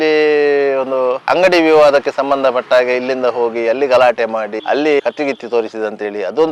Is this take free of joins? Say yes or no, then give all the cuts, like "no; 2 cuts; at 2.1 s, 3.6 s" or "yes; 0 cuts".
yes; 0 cuts